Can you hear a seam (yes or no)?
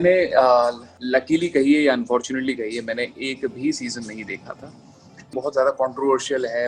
yes